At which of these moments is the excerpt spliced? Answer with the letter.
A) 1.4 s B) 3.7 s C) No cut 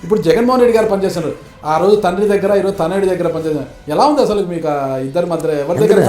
C